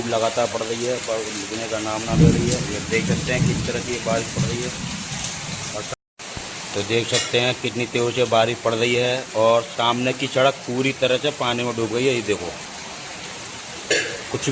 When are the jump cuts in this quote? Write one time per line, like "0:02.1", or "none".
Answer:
0:05.9

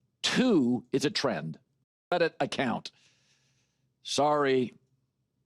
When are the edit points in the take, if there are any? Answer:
0:02.1

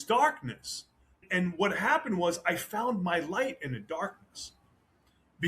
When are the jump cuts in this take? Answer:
0:01.1

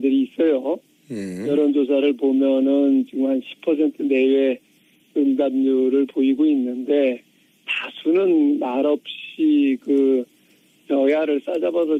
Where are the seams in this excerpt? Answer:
none

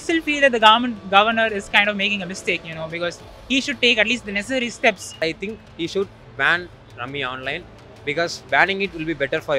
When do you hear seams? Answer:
0:05.2

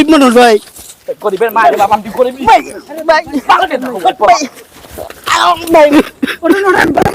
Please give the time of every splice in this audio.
0:05.6

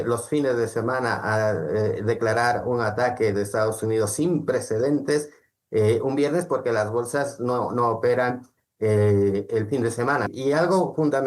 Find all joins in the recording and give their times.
0:10.3

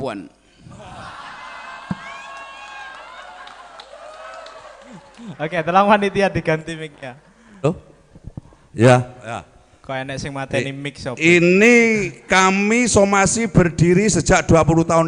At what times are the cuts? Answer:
none

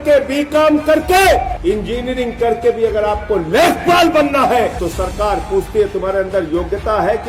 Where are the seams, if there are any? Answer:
0:01.5
0:04.8

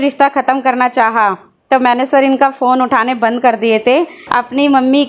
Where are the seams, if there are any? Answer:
0:04.2

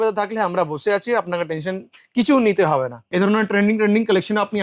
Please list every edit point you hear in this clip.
0:03.0

